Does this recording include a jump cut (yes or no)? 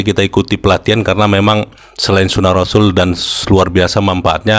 no